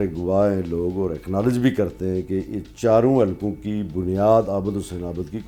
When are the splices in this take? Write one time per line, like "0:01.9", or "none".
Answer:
none